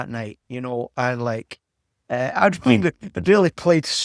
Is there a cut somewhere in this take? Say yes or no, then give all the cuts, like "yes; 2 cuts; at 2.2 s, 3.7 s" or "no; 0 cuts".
no; 0 cuts